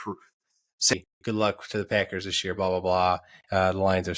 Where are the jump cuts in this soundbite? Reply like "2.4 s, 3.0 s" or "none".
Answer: 0.9 s